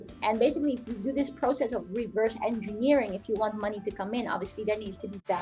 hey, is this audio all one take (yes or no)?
yes